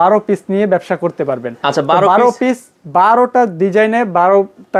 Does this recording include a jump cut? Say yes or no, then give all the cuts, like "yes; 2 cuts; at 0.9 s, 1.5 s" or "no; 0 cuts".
no; 0 cuts